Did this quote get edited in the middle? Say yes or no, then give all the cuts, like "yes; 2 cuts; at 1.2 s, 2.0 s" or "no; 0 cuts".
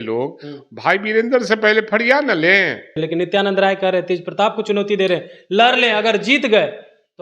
yes; 1 cut; at 3.0 s